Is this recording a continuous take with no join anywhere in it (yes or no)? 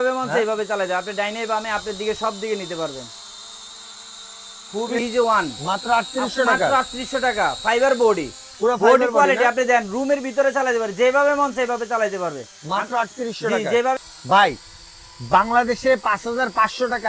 no